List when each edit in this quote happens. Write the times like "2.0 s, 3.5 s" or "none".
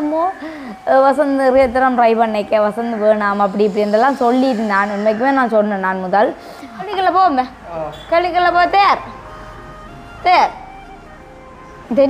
6.9 s